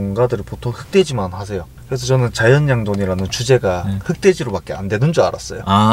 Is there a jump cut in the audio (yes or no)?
no